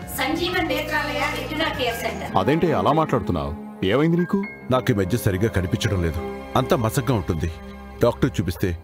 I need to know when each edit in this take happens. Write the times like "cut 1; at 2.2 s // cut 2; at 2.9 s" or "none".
cut 1; at 2.2 s